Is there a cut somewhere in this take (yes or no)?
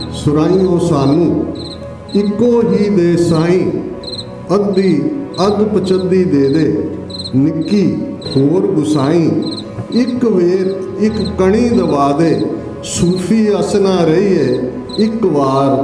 no